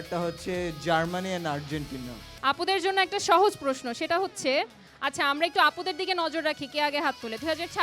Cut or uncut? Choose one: cut